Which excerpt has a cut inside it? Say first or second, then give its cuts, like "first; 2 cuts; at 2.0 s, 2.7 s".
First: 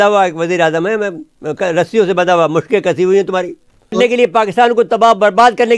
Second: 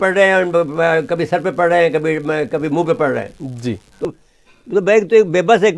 second; 1 cut; at 4.1 s